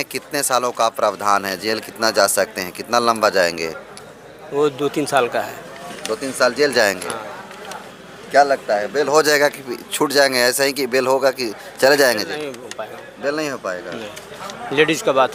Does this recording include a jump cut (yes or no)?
no